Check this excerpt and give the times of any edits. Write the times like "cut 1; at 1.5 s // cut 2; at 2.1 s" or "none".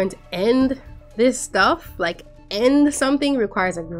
none